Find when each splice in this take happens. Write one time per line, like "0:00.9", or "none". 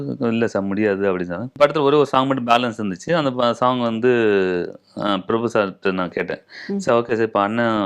0:01.5